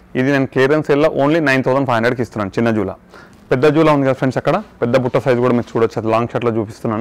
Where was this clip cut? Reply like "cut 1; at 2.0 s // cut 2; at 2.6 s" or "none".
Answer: none